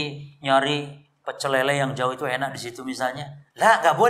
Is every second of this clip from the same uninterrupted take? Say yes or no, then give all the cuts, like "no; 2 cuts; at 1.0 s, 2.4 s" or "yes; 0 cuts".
yes; 0 cuts